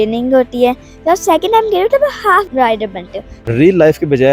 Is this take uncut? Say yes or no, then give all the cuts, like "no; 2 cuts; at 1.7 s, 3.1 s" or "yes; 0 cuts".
no; 1 cut; at 2.9 s